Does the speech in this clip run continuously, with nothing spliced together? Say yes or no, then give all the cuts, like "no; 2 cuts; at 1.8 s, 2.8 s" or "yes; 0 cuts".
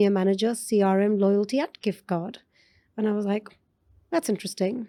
yes; 0 cuts